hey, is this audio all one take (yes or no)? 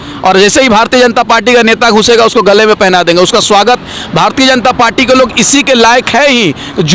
yes